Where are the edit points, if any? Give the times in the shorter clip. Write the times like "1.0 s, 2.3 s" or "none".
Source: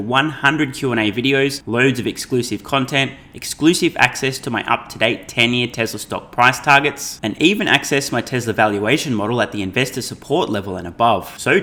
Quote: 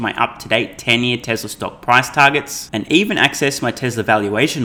none